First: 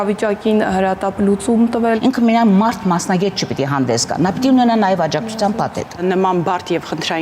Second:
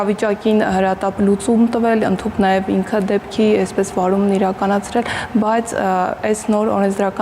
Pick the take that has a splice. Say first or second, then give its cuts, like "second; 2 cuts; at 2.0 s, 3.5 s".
first; 2 cuts; at 2.0 s, 6.0 s